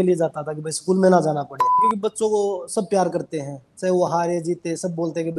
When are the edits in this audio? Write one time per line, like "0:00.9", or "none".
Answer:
0:01.9